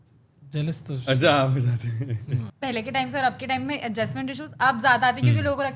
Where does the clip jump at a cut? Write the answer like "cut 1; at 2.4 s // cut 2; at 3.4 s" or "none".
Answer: cut 1; at 2.5 s